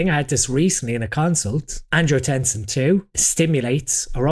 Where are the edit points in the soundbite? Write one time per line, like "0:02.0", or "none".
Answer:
0:01.9
0:03.2

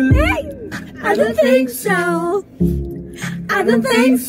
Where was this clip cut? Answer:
none

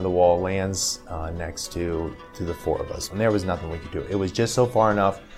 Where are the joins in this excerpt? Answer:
0:03.0

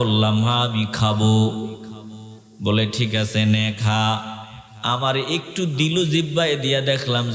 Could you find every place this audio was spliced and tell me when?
none

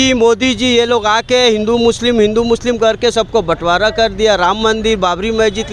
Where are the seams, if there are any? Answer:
none

